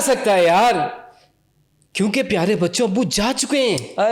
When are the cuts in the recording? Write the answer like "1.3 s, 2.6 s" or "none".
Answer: none